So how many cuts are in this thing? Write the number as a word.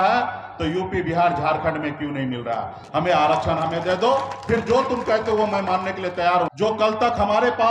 one